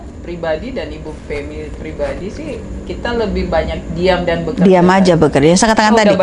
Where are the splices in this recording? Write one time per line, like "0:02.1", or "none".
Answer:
none

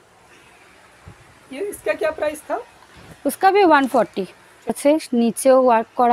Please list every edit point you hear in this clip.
0:04.8

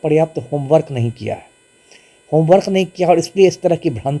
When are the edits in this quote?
none

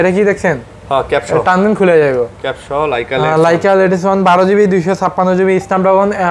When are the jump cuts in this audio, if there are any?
none

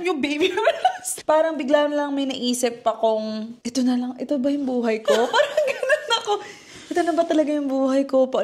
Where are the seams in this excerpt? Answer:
0:01.1
0:03.5

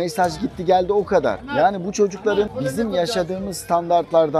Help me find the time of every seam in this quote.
0:02.5

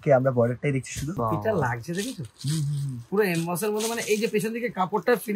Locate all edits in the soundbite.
0:01.1

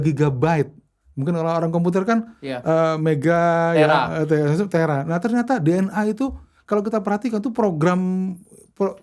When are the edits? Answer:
none

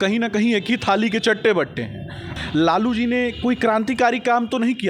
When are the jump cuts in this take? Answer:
0:02.3

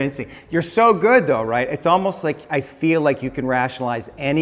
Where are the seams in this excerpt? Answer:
none

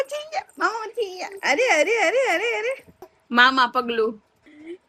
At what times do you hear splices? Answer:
none

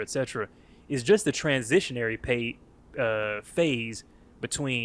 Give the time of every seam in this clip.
none

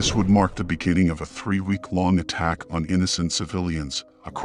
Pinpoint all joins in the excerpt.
none

